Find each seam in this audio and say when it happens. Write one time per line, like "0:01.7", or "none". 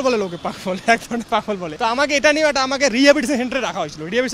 0:01.7